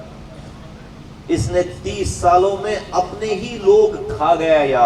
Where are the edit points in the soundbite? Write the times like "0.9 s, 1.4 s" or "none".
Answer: none